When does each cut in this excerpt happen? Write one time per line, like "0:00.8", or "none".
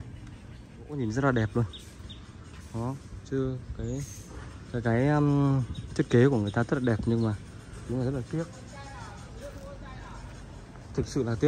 0:00.9